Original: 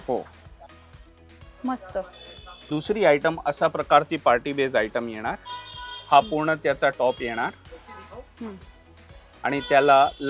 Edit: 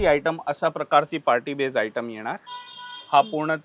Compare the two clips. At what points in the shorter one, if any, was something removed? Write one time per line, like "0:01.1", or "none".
none